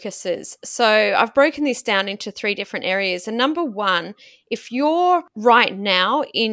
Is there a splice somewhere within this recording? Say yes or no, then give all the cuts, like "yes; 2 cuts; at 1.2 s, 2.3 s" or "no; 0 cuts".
yes; 1 cut; at 5.3 s